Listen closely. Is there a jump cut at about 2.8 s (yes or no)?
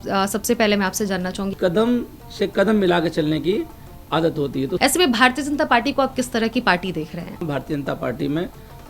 no